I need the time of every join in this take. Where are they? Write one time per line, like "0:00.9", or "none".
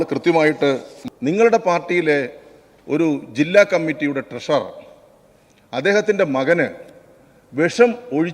0:00.9